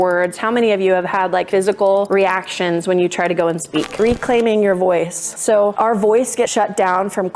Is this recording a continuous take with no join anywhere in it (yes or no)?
no